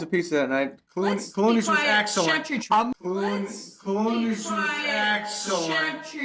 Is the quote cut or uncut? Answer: uncut